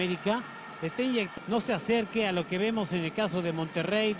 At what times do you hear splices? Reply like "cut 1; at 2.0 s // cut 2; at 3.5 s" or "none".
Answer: cut 1; at 2.8 s